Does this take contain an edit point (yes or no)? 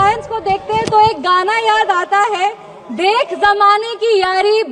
no